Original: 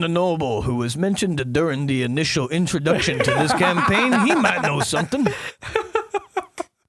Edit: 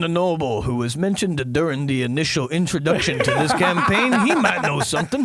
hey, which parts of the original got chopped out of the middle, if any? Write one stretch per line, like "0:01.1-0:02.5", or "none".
none